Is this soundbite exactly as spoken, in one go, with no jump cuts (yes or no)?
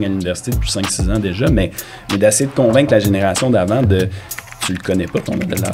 no